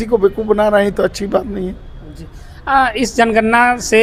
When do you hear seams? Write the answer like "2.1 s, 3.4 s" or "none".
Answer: none